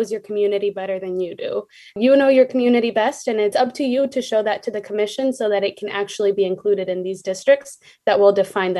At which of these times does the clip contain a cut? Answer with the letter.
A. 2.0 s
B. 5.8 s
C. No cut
A